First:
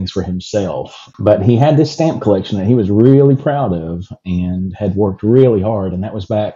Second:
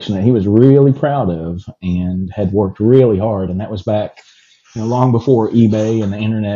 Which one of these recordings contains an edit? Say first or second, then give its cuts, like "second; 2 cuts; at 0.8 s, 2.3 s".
first; 1 cut; at 1.0 s